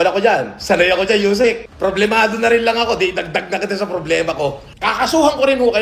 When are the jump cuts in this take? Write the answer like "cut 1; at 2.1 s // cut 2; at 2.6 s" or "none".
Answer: cut 1; at 1.7 s // cut 2; at 4.7 s